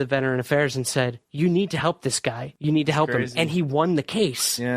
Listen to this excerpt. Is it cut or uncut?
cut